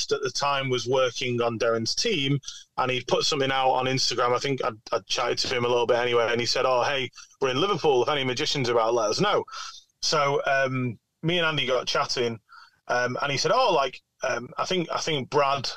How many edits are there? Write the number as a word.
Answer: zero